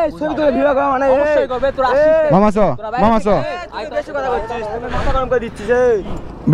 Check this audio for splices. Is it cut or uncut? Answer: uncut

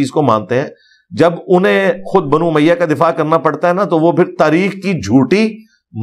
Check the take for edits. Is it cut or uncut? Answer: uncut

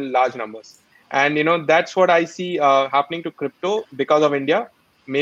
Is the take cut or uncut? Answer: uncut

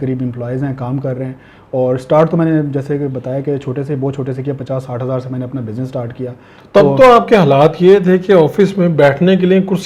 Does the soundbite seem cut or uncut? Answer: uncut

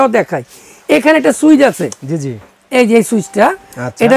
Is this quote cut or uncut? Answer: uncut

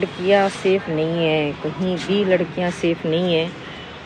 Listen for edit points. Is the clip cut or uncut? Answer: uncut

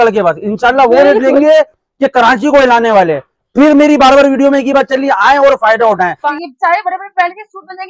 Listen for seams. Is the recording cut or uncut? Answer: cut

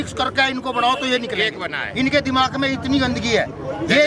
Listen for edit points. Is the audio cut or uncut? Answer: uncut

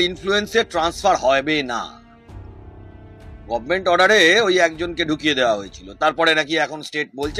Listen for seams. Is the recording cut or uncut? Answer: uncut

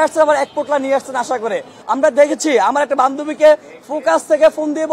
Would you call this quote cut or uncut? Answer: cut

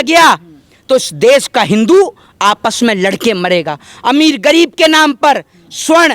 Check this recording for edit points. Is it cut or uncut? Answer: uncut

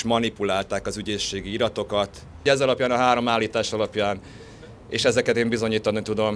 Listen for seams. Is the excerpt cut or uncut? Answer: cut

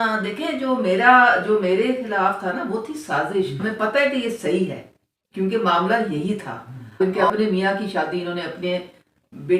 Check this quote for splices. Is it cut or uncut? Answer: cut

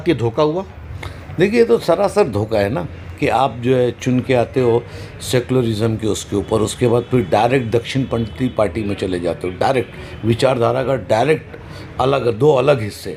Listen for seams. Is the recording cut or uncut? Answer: uncut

